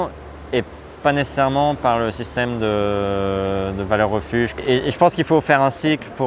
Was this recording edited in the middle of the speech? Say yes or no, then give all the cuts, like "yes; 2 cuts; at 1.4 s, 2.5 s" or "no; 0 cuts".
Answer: yes; 1 cut; at 4.5 s